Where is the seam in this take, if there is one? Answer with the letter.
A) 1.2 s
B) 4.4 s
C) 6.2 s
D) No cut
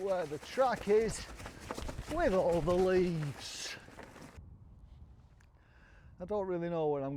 B